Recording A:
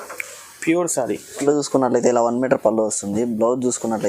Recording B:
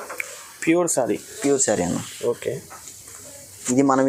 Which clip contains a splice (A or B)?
A